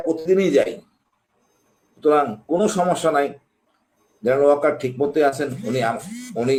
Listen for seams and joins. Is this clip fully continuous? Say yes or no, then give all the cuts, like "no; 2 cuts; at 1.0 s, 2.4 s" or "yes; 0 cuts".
yes; 0 cuts